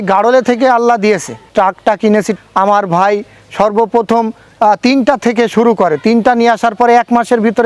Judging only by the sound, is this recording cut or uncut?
cut